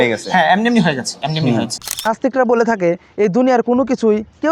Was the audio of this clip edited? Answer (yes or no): no